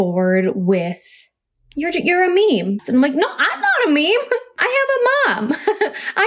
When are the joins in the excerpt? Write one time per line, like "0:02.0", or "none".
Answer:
0:02.8
0:04.5